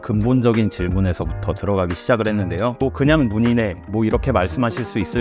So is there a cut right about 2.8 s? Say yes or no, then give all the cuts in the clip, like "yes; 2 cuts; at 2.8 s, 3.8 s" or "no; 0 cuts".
yes; 1 cut; at 2.8 s